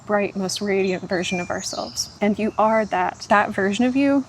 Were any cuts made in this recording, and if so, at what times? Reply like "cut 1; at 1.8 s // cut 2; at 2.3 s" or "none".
cut 1; at 2.0 s // cut 2; at 3.2 s